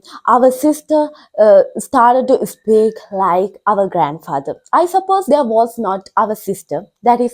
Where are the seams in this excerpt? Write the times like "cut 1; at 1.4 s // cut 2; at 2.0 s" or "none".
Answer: none